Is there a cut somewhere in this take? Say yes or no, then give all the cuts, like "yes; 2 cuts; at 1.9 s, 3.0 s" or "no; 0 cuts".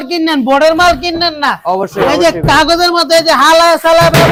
no; 0 cuts